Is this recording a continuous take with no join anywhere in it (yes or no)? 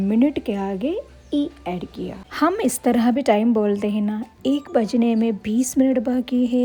yes